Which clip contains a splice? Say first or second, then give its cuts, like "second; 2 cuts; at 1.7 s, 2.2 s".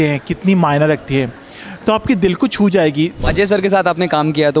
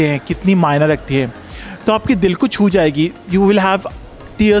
first; 1 cut; at 3.2 s